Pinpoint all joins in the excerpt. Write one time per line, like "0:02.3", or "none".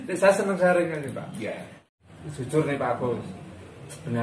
0:01.8